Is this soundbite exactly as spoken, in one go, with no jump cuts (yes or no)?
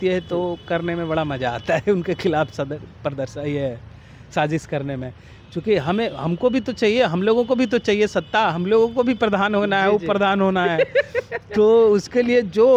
yes